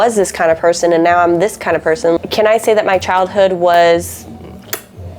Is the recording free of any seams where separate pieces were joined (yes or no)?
no